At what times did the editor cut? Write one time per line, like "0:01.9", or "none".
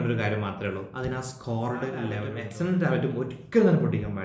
0:02.3